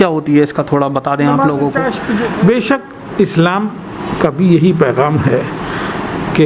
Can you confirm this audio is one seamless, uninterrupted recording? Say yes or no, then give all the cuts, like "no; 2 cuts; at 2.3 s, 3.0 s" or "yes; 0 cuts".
no; 1 cut; at 2.0 s